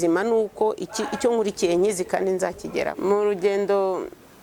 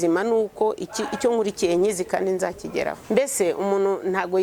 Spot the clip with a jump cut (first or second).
second